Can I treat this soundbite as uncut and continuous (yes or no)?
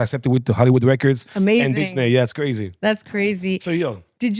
yes